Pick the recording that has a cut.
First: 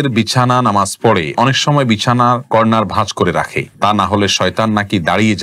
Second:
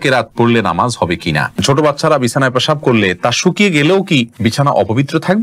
second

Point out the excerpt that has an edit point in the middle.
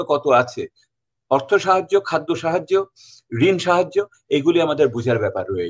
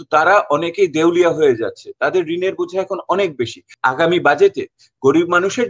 second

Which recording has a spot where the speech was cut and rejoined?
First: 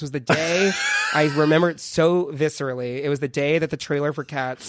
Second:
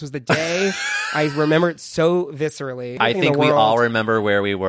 second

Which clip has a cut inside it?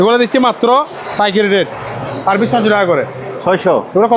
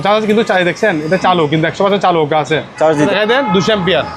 second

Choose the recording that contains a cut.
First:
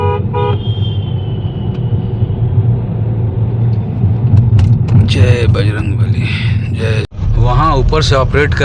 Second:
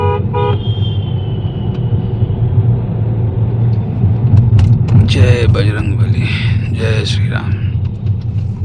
first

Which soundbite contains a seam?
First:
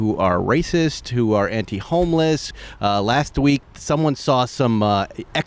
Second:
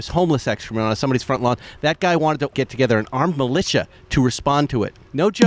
first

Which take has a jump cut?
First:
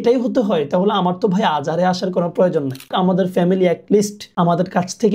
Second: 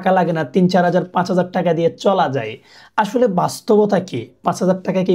first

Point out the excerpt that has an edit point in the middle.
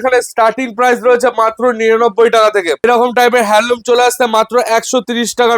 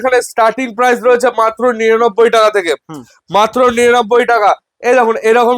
first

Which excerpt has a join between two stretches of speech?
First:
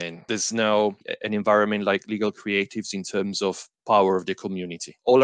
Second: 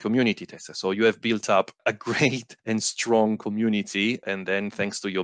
first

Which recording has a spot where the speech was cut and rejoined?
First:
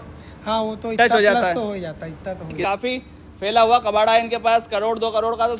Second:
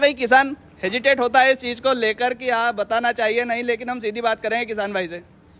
first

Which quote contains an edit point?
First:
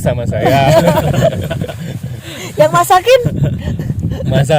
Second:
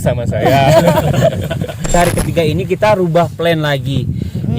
second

